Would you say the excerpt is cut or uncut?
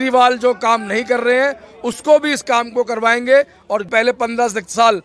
cut